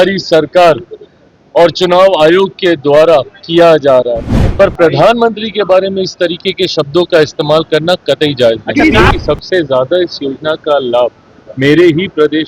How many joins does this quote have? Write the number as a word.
two